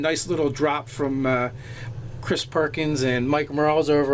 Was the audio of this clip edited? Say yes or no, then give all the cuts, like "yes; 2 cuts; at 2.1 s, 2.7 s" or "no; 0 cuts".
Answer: no; 0 cuts